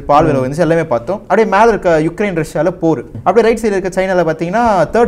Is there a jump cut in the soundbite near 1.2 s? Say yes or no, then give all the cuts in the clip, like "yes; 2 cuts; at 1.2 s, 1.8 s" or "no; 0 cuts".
no; 1 cut; at 3.1 s